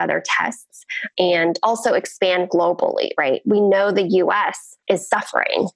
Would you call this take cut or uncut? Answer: cut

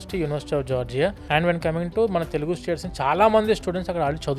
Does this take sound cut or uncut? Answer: cut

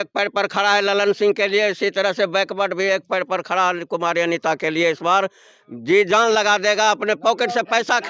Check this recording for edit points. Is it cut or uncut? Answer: uncut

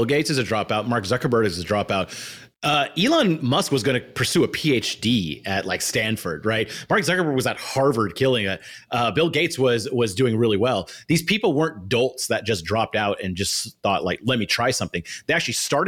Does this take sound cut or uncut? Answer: uncut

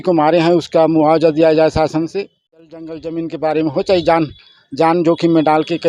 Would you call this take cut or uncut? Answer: cut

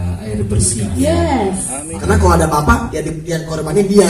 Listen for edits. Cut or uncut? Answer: cut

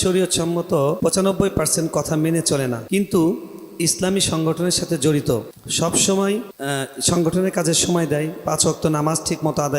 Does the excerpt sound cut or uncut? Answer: cut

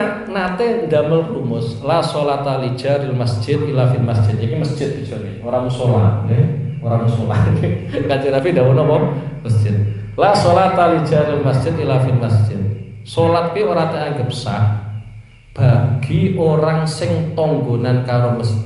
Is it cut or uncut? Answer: uncut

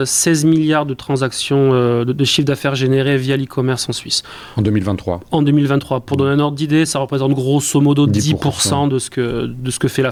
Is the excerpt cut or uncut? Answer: uncut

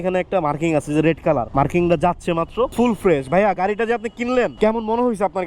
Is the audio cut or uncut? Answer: cut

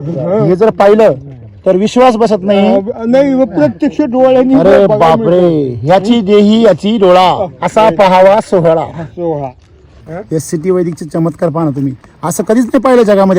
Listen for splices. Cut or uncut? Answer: cut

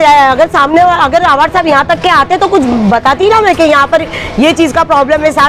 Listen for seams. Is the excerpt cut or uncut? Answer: uncut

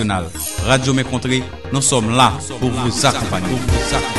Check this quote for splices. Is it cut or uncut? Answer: uncut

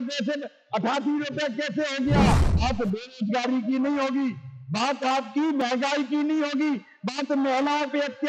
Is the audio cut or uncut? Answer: cut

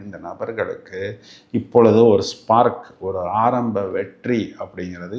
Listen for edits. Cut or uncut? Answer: uncut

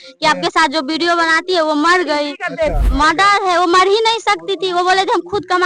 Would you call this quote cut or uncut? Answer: cut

